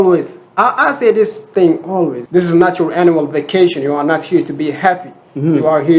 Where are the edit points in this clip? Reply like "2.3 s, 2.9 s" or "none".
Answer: 2.2 s